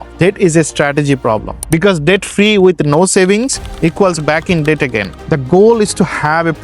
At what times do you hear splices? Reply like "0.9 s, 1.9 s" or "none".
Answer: 1.5 s, 5.2 s